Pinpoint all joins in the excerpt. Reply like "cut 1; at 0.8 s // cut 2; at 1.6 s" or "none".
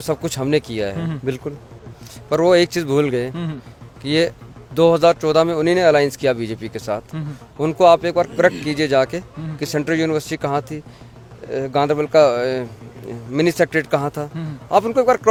none